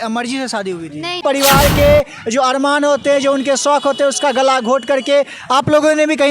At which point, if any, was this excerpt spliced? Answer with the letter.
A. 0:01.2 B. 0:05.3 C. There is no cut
A